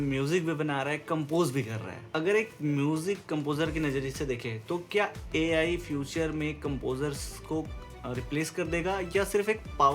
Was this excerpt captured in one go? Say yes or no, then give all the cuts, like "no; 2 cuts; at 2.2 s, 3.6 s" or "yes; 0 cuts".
yes; 0 cuts